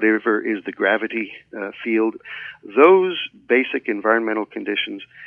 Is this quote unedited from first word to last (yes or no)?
no